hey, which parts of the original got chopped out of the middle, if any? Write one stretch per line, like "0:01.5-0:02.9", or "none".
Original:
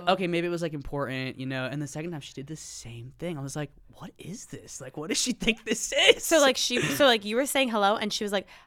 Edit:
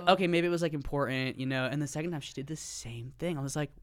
none

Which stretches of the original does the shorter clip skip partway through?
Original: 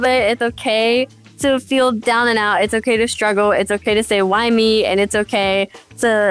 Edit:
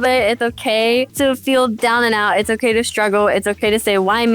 0:01.1-0:01.3

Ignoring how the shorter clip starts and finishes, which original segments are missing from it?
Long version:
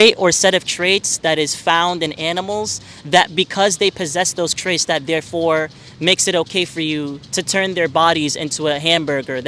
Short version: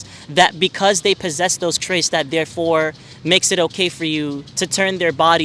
none

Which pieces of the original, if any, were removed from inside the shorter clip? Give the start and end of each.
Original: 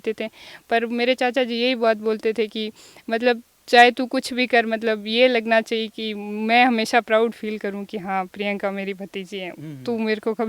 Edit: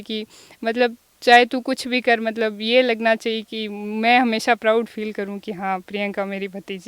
none

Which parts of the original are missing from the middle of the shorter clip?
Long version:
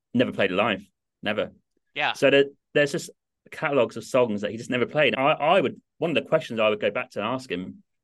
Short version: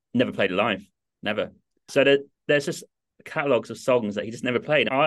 0:01.9-0:02.1

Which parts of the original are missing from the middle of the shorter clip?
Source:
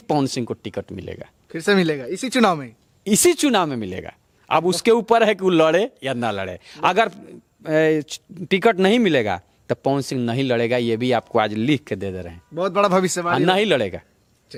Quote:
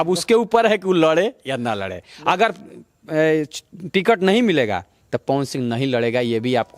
none

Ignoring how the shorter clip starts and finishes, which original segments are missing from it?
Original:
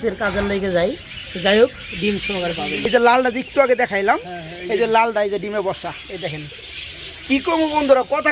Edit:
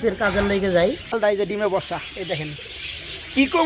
0:01.2-0:05.1

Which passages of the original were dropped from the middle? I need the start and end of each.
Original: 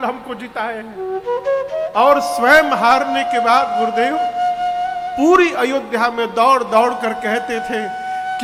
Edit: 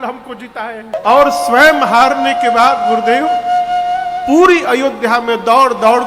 0:00.9-0:01.8

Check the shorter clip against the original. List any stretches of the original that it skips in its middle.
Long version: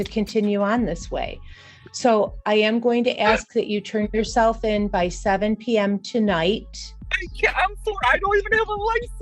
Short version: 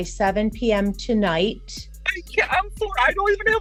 none

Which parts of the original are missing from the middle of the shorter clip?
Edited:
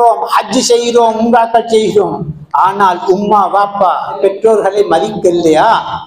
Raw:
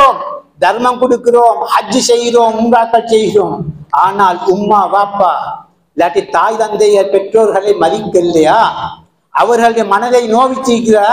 0:05.6-0:07.1

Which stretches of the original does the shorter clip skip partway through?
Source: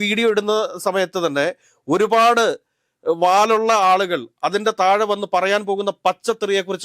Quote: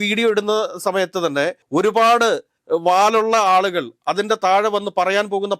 0:01.6-0:01.8
0:02.7-0:02.9

